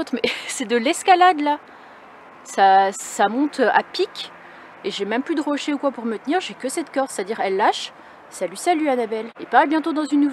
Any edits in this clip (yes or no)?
yes